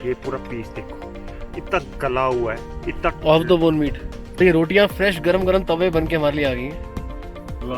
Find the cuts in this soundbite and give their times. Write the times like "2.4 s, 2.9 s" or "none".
4.4 s